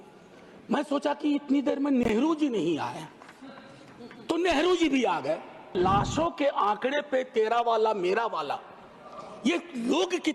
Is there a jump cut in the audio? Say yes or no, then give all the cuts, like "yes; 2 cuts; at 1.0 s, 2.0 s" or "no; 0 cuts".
yes; 1 cut; at 5.7 s